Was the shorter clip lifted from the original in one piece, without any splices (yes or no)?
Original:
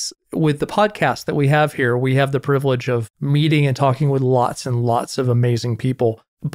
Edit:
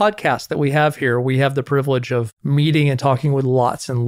yes